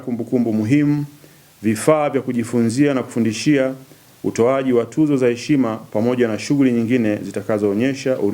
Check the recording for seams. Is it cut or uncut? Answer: uncut